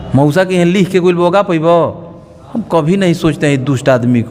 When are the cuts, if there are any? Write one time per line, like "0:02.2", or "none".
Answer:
none